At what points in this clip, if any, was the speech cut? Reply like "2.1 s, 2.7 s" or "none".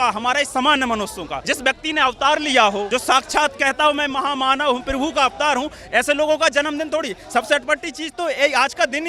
1.3 s, 2.9 s